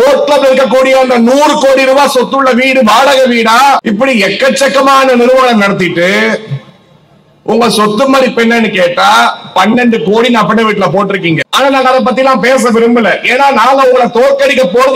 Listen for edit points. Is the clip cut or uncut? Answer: cut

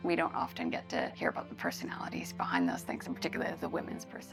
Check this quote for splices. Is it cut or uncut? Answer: uncut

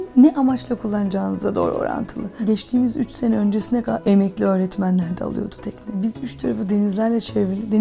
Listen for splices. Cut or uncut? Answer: cut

